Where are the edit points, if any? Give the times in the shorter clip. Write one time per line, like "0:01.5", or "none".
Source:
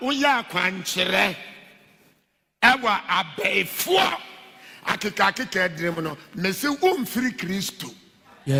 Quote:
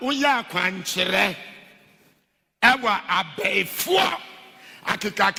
none